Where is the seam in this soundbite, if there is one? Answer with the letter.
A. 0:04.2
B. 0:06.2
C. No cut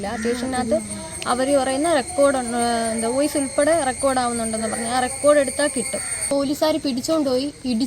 B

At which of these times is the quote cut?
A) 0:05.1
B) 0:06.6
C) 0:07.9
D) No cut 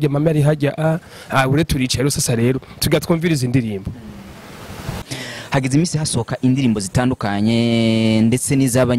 A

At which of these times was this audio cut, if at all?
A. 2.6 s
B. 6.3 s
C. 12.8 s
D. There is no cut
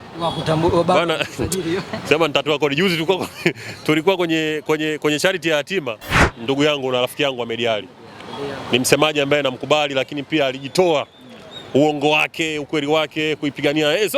B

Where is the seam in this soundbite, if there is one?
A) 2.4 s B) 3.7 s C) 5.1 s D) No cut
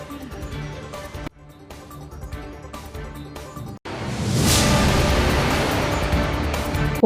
B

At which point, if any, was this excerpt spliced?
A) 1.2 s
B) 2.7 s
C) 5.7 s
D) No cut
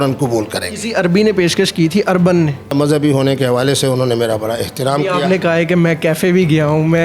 B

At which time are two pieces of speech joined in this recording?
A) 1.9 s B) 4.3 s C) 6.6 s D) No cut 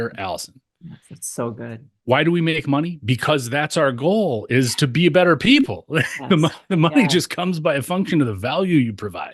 A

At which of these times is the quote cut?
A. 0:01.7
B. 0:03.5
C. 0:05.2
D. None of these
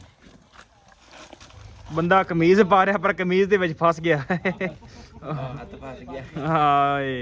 A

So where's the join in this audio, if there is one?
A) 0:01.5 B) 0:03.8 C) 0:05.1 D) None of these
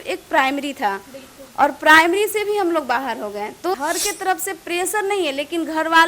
B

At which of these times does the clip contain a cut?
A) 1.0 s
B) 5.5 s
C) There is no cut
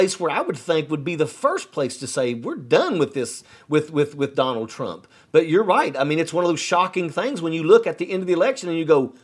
C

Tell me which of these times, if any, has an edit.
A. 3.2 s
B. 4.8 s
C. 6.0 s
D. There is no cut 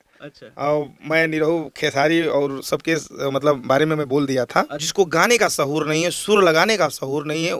B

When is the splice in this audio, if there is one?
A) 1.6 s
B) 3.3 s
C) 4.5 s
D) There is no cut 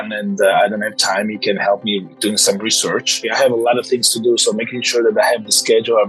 B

